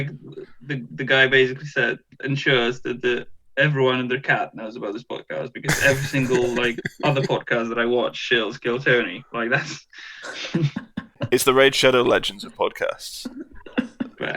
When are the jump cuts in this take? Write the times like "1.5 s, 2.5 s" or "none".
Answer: 11.2 s